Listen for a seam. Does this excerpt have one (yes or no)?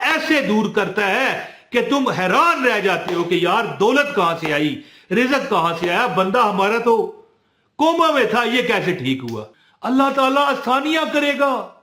yes